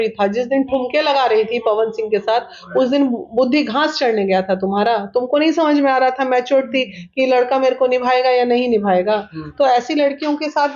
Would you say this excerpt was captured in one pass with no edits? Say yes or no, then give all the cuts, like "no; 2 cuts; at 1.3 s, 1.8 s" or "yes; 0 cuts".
yes; 0 cuts